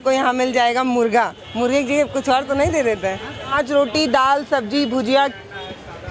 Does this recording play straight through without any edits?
no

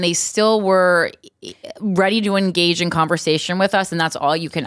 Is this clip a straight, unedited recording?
yes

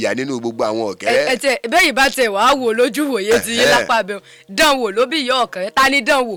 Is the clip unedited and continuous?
yes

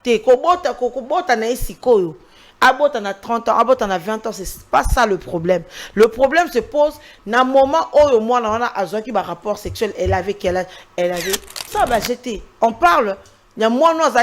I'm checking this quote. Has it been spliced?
yes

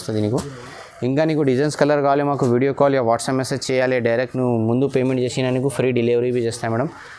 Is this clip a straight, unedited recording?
yes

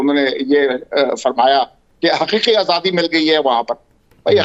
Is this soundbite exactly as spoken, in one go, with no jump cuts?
yes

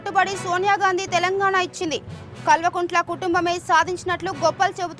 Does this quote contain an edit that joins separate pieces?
no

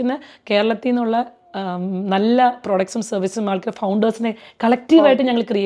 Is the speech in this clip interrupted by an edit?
no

